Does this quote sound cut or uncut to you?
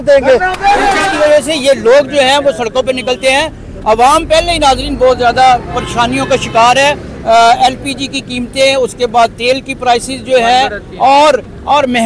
cut